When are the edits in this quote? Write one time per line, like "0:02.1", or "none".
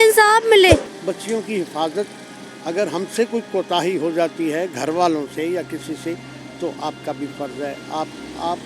0:00.9